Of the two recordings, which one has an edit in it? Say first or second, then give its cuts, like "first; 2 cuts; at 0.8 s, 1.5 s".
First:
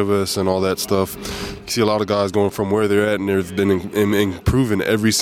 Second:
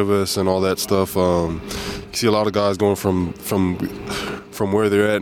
first; 2 cuts; at 1.1 s, 2.5 s